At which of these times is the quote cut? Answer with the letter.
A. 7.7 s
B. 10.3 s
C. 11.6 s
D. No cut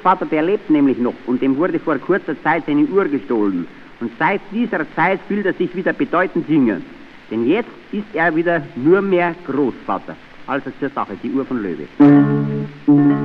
C